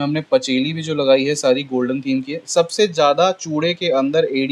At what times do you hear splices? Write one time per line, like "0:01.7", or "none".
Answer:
none